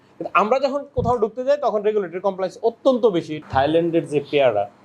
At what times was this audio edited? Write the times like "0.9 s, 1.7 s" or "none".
3.3 s